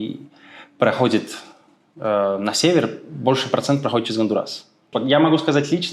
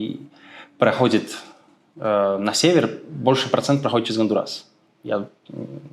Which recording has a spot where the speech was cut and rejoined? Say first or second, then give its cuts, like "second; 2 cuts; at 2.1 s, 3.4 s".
first; 1 cut; at 4.8 s